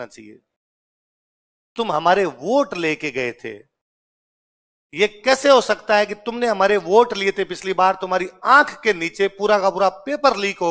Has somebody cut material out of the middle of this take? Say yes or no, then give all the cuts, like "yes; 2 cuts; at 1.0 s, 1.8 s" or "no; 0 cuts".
no; 0 cuts